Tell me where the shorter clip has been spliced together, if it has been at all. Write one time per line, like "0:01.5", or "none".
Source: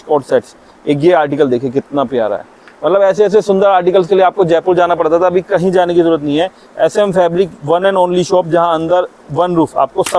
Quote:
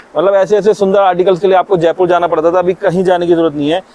none

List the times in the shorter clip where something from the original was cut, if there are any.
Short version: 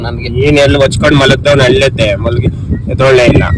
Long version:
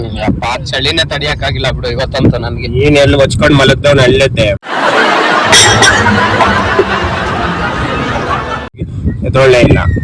0:02.3

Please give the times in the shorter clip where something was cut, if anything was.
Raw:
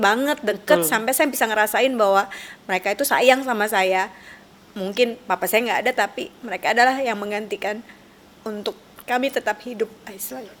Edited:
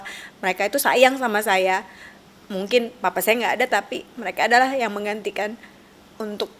none

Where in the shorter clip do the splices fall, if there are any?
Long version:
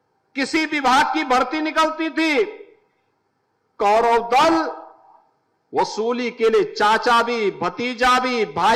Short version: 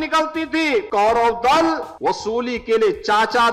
0:00.9
0:01.9

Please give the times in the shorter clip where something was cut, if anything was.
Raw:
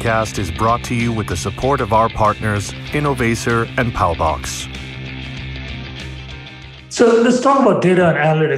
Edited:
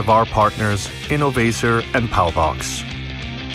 0:02.6

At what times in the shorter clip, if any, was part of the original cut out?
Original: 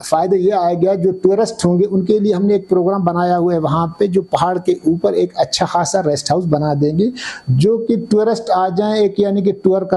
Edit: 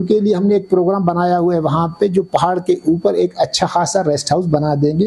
none

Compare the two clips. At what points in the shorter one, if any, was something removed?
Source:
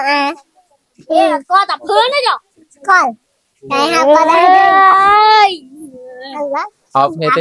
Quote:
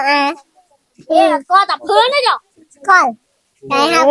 none

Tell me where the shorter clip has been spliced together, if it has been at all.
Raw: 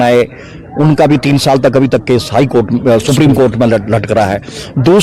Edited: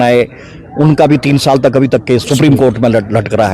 0:02.3

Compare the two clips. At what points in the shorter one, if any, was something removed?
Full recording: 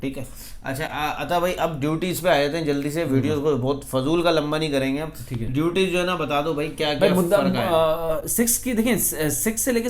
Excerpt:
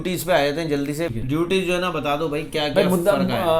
0:01.1

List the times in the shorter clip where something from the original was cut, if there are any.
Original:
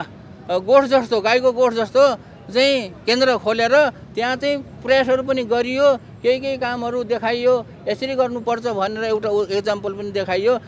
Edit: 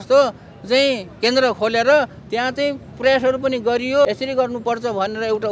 0:04.1

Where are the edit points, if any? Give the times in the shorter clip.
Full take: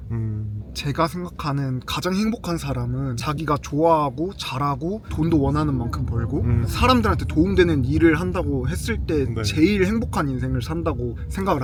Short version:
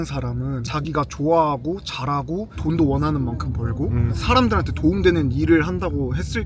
none

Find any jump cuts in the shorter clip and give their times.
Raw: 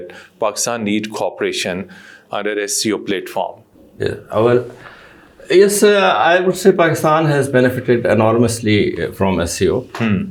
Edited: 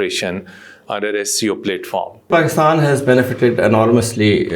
0:02.3

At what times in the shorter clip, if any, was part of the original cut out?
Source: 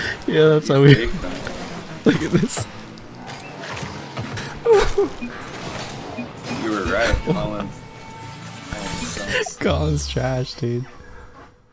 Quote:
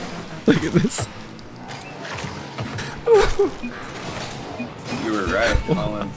none

